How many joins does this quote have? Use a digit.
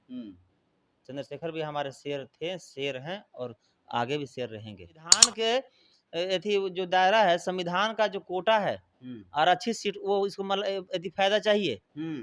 1